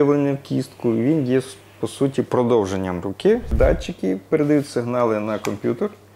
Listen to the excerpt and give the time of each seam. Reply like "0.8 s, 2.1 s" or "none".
3.5 s